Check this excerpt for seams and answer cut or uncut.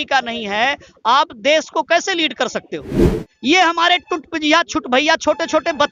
cut